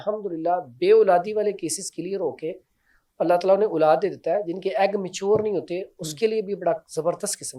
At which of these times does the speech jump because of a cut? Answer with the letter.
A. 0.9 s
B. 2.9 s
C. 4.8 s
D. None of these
D